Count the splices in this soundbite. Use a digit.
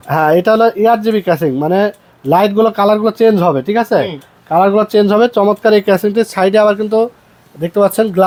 0